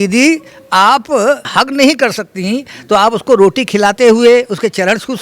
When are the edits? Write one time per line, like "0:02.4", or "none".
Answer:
0:01.5